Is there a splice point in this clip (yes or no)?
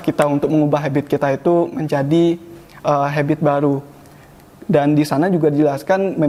no